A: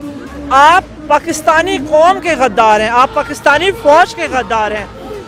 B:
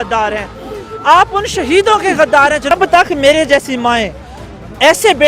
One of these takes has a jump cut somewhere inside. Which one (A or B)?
B